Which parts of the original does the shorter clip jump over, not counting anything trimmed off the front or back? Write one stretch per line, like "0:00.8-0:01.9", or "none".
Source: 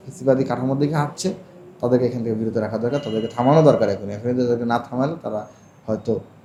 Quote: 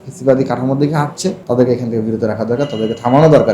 0:01.4-0:01.7